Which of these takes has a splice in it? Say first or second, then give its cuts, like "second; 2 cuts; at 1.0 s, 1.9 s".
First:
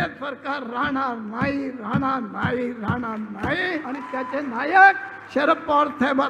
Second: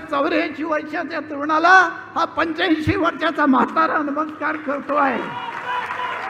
first; 1 cut; at 3.8 s